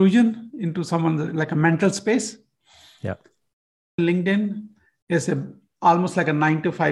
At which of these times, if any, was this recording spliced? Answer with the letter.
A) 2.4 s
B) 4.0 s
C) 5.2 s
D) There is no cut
B